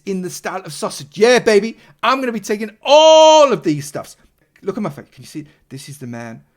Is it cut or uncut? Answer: cut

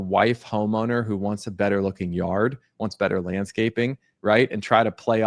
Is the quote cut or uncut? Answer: uncut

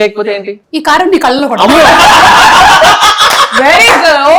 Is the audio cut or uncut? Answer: uncut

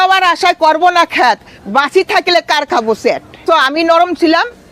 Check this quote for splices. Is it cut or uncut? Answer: cut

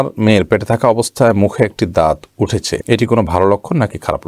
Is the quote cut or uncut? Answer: uncut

